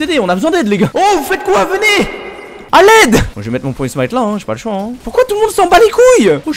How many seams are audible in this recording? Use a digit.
0